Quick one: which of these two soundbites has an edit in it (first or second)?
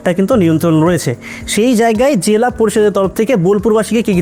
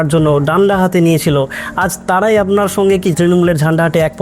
second